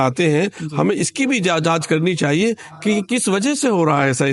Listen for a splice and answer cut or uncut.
uncut